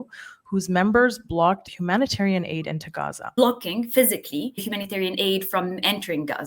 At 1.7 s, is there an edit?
yes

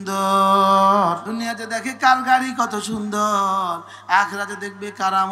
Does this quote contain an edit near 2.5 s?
no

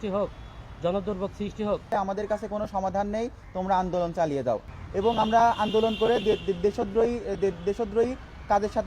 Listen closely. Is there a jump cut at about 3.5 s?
no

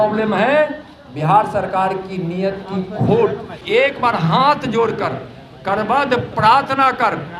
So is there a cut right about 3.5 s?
yes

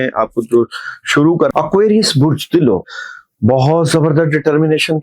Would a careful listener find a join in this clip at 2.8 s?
yes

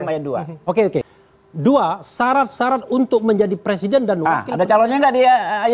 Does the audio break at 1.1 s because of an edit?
yes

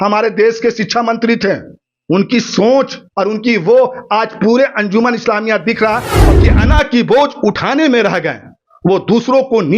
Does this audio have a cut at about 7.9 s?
no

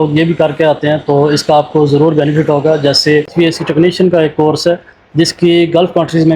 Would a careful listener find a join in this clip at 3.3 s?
yes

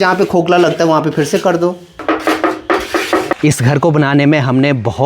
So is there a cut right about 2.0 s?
yes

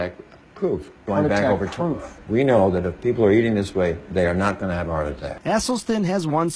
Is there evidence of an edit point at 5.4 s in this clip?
no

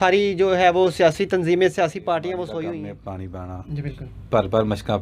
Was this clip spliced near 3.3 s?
yes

